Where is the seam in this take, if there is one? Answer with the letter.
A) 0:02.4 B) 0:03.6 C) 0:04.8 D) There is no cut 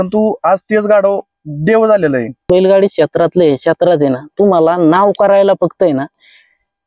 A